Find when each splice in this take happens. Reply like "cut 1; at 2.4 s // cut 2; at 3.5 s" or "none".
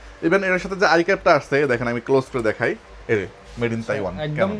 none